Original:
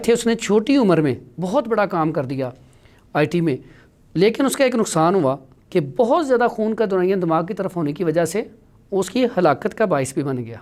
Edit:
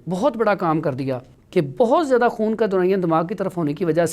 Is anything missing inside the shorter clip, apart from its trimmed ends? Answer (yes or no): yes